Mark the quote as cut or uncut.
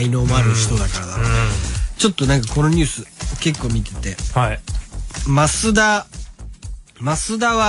cut